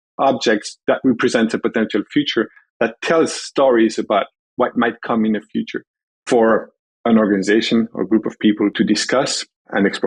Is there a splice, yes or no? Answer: yes